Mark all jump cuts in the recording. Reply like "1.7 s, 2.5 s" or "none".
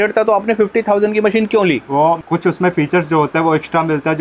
2.2 s